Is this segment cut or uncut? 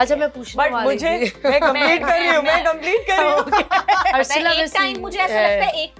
cut